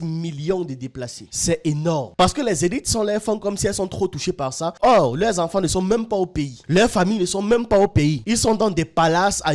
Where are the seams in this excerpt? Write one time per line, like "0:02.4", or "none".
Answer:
0:02.1